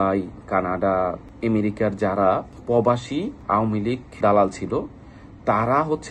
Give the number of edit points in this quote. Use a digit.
0